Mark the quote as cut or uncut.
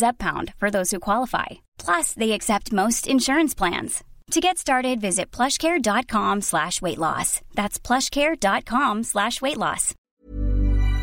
cut